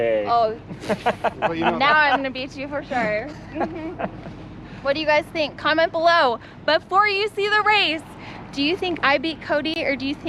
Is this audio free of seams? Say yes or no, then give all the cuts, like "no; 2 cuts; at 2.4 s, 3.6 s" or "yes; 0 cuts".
yes; 0 cuts